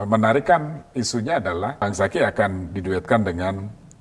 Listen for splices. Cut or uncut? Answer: cut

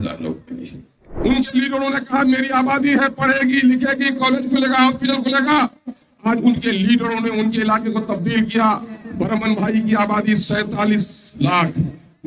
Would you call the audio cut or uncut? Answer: cut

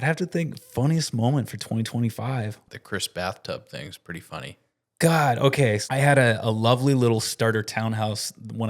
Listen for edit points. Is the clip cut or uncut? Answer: cut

